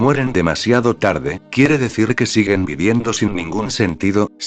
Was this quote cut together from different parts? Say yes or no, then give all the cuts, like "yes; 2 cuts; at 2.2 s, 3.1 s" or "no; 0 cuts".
no; 0 cuts